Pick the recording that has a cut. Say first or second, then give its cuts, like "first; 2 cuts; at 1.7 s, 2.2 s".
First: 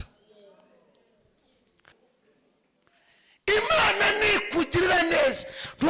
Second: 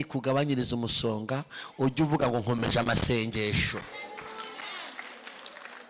first; 1 cut; at 1.9 s